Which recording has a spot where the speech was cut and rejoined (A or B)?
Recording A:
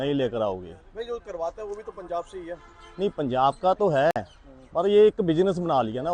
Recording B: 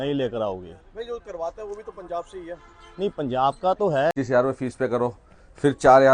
B